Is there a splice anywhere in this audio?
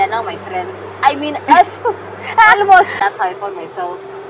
yes; 1 cut; at 2.9 s

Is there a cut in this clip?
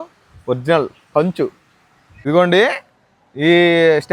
no; 0 cuts

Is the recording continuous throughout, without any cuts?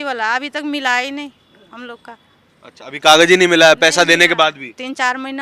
yes; 0 cuts

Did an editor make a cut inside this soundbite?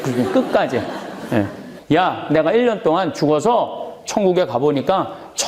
yes; 1 cut; at 1.7 s

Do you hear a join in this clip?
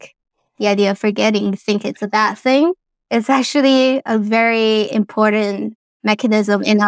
no; 0 cuts

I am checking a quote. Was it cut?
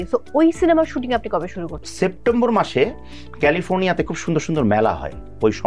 yes; 1 cut; at 1.8 s

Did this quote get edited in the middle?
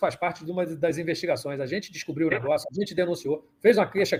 no; 0 cuts

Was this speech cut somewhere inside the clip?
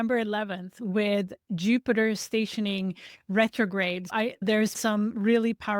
yes; 1 cut; at 4.8 s

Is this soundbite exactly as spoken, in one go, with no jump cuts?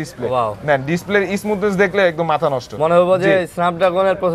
yes; 0 cuts

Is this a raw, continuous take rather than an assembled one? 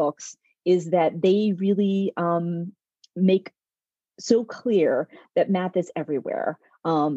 yes; 0 cuts

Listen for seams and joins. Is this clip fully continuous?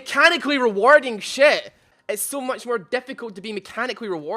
no; 1 cut; at 1.9 s

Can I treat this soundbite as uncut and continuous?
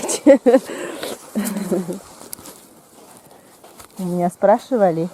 yes; 0 cuts

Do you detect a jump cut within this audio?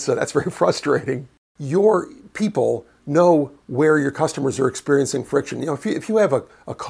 yes; 1 cut; at 1.5 s

